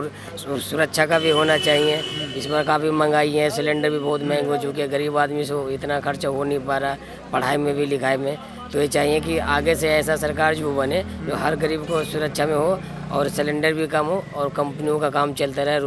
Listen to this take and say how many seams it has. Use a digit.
0